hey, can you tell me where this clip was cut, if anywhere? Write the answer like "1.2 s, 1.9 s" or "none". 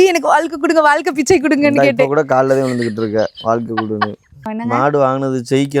4.5 s